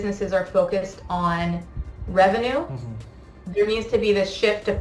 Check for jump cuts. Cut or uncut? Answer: uncut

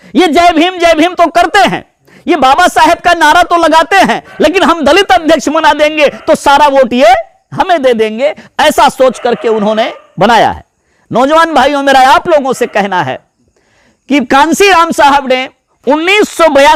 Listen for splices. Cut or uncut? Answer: uncut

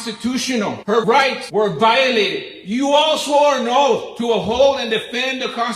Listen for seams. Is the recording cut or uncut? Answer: cut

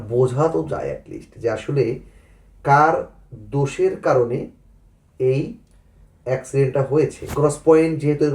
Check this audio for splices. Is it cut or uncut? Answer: cut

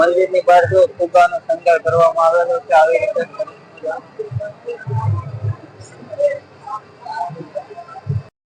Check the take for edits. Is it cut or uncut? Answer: uncut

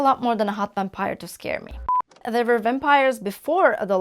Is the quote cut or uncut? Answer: cut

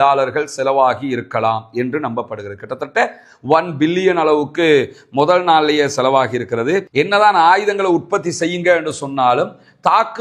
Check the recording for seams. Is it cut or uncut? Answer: cut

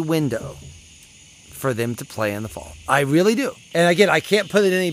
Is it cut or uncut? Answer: cut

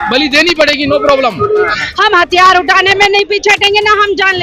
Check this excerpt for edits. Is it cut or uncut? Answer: cut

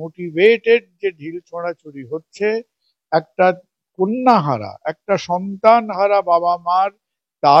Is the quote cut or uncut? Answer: uncut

